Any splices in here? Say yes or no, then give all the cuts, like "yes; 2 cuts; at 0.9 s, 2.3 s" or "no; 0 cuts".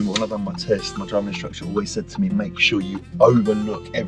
no; 0 cuts